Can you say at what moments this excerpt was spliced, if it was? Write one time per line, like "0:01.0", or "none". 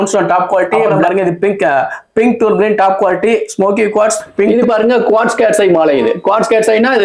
0:00.9
0:04.5